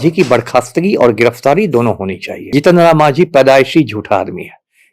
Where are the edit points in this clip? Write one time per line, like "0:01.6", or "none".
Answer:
0:02.5